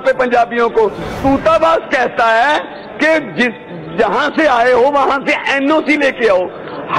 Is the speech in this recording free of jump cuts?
no; 1 cut; at 1.2 s

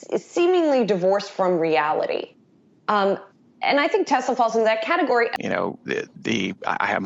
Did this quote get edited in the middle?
yes; 1 cut; at 5.4 s

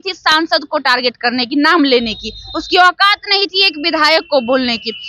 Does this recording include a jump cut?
no; 0 cuts

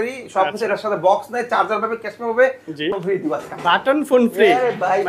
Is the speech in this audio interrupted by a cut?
yes; 1 cut; at 3.0 s

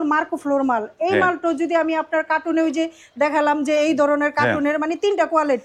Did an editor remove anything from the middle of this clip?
no; 0 cuts

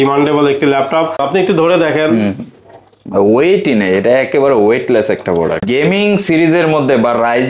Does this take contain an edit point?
yes; 2 cuts; at 1.2 s, 5.6 s

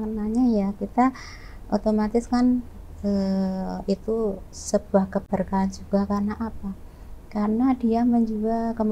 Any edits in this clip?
no; 0 cuts

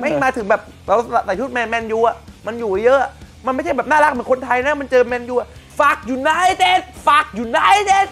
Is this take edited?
no; 0 cuts

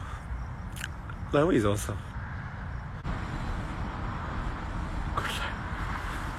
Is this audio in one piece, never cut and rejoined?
yes; 0 cuts

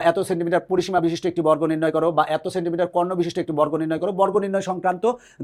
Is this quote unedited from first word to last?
yes; 0 cuts

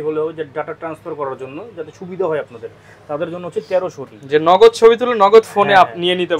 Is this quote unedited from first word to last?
yes; 0 cuts

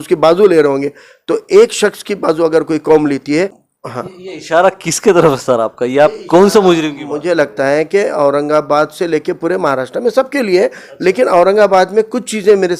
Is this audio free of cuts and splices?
no; 1 cut; at 3.6 s

